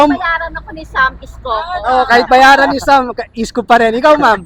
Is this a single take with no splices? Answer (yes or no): yes